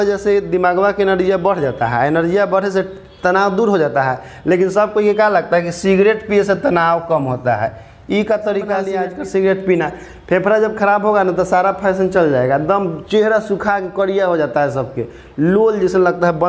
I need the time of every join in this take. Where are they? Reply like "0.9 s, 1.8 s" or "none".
9.0 s